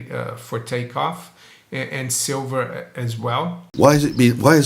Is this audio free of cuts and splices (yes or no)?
no